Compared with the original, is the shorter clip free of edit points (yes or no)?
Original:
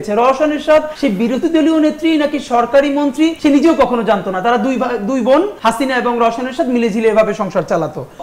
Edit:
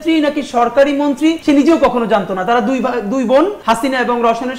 yes